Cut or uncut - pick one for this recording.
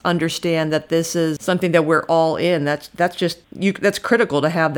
cut